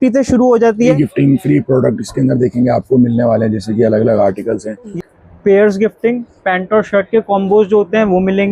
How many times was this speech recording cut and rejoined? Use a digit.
2